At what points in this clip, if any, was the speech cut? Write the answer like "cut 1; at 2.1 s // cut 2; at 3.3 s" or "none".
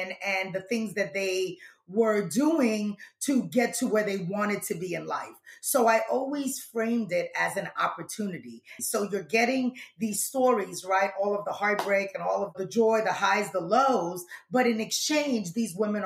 cut 1; at 8.7 s // cut 2; at 12.5 s